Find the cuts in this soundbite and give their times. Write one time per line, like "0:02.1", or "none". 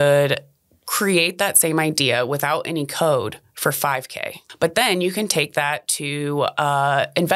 0:04.4